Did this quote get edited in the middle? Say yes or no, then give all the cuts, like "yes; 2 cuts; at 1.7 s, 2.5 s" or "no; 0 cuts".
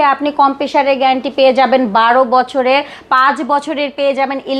no; 0 cuts